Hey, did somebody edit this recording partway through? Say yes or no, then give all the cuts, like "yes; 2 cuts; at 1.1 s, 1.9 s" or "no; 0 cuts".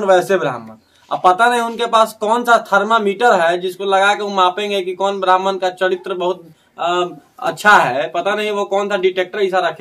no; 0 cuts